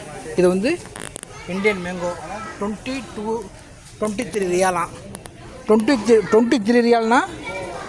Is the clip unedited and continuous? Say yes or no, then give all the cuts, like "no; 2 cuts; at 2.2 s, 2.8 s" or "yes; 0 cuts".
yes; 0 cuts